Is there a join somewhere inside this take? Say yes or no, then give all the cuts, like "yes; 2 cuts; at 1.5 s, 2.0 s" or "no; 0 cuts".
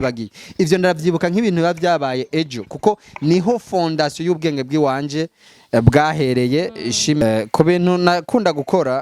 yes; 1 cut; at 7.2 s